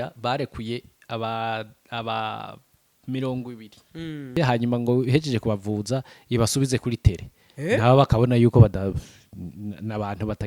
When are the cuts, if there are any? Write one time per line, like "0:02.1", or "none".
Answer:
0:04.4